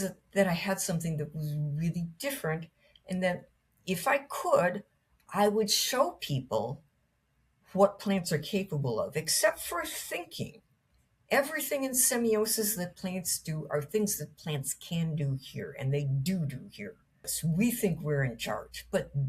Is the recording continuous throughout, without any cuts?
no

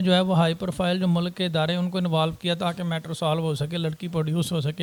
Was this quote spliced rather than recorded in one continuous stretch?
no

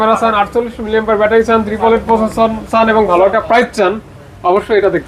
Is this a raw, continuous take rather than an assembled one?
yes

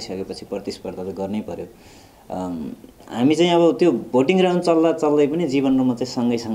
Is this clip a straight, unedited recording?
yes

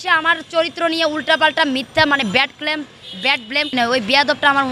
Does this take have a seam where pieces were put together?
yes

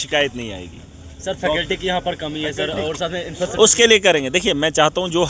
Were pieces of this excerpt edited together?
no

